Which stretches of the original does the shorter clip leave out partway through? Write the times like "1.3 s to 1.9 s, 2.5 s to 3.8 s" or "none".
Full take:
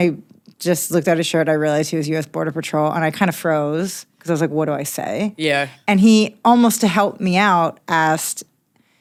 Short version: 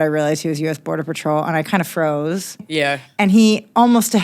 4.1 s to 5.3 s